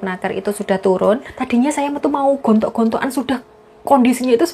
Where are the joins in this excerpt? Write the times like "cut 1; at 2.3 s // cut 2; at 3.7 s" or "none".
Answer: cut 1; at 1.3 s